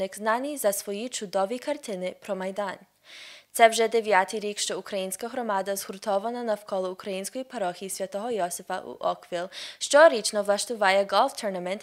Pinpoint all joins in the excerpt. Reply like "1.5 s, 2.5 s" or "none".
3.2 s